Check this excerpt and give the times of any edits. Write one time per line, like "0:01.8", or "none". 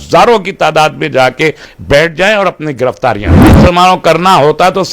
0:03.4